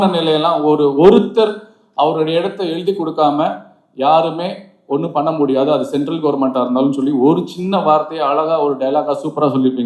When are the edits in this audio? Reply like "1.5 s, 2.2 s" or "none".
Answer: none

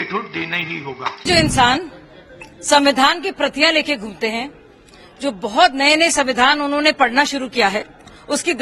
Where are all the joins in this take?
1.2 s

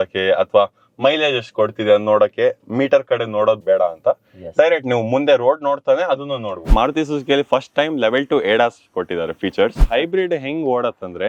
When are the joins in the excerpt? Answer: 6.7 s, 9.8 s

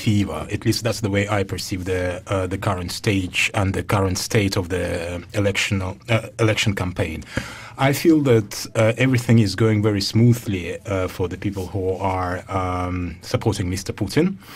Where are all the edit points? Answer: 11.8 s

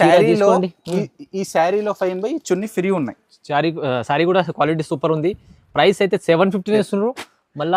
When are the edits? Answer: none

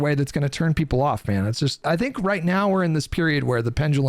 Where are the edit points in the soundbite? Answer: 1.8 s

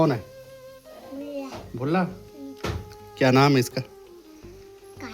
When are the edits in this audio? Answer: none

